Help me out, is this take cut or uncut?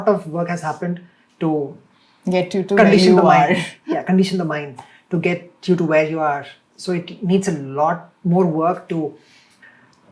uncut